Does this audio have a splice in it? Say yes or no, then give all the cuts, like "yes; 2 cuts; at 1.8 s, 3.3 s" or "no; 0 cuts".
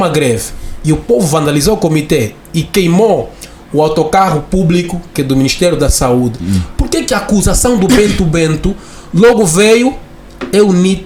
no; 0 cuts